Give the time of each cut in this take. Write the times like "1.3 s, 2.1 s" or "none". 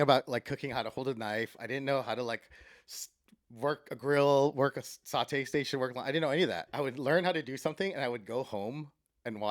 6.7 s